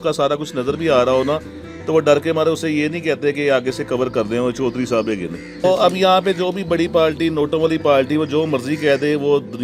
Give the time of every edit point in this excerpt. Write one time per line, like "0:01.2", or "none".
0:05.6